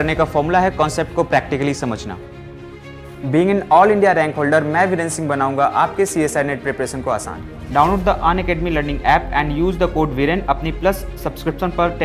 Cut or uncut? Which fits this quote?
uncut